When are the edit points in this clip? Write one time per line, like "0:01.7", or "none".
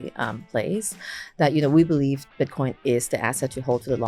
none